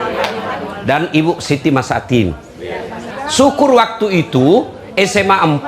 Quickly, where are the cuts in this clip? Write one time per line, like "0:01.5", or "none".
0:03.0